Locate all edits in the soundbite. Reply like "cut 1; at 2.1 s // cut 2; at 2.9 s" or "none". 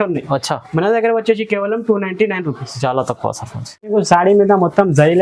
cut 1; at 3.9 s